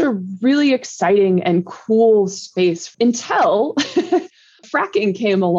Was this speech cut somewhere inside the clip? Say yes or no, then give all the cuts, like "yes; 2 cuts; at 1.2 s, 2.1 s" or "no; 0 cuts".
yes; 1 cut; at 2.9 s